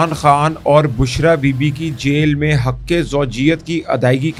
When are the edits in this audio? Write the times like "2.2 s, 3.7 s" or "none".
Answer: none